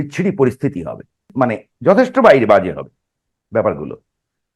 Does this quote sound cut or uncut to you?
cut